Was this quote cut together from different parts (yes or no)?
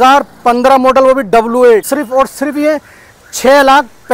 yes